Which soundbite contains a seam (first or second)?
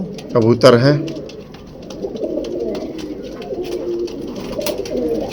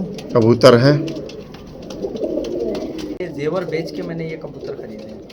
second